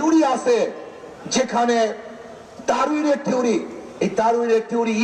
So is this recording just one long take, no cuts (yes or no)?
yes